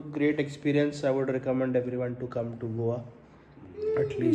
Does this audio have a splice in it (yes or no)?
no